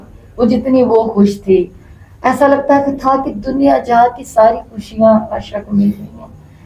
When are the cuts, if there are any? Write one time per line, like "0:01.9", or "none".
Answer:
none

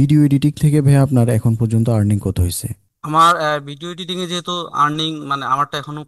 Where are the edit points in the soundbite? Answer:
none

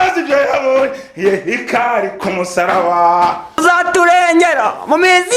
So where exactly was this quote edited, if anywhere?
0:03.6

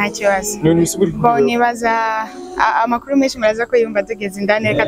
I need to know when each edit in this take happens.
none

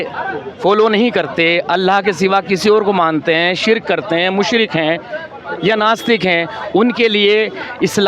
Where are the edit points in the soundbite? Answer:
none

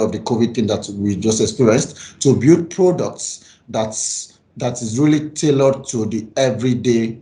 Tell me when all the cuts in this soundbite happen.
none

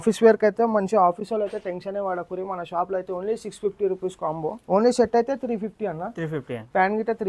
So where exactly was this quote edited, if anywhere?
0:04.6

